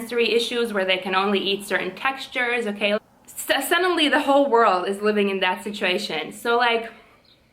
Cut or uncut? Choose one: cut